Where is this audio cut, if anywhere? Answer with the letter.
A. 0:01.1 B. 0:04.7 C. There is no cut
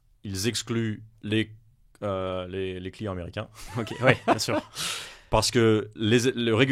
A